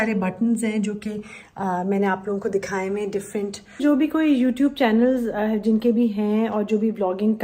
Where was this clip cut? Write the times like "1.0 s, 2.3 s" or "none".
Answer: 3.8 s